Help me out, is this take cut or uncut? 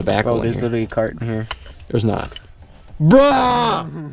uncut